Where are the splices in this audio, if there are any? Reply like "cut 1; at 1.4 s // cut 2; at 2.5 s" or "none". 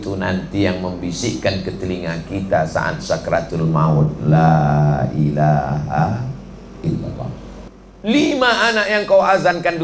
cut 1; at 7.6 s